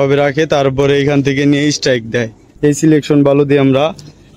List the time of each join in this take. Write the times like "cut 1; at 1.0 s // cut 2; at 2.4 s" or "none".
cut 1; at 2.4 s